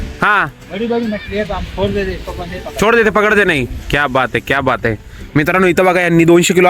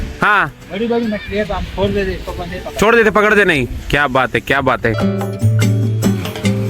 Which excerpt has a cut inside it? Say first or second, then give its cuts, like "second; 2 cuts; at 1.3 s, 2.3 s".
second; 1 cut; at 5.0 s